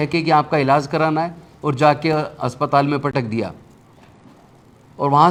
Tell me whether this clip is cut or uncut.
uncut